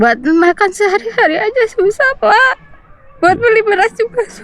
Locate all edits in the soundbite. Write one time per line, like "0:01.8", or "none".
none